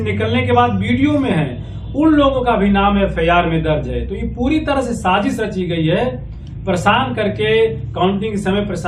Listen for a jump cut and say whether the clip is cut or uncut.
uncut